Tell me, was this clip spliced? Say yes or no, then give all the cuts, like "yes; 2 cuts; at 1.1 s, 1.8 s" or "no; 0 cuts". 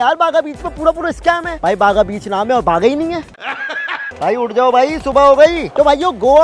no; 0 cuts